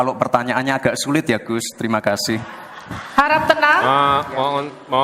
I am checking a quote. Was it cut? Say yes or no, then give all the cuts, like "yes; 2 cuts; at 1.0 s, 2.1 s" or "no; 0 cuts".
no; 0 cuts